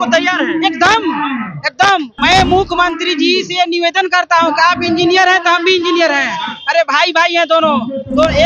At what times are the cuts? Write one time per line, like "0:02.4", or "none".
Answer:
0:02.1

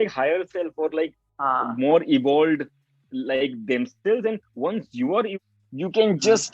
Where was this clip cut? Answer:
0:05.3

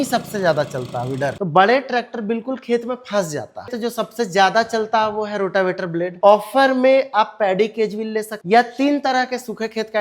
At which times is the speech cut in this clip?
0:01.4
0:03.7
0:06.1

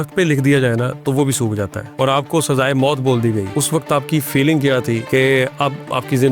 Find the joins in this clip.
0:01.8
0:03.5
0:05.0

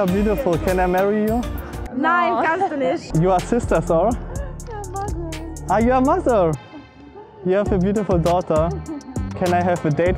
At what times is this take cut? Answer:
0:03.1
0:09.3

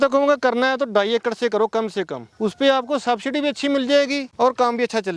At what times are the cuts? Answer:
0:02.2
0:04.3

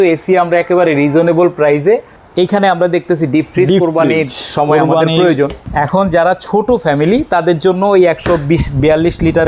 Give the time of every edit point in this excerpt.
0:02.1
0:05.6

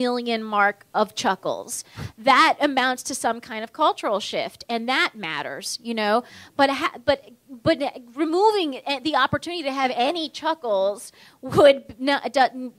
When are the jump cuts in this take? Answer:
none

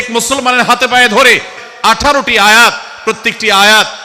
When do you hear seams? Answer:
0:01.6

